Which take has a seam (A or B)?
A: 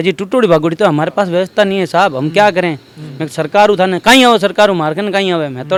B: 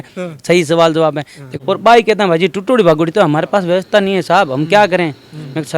B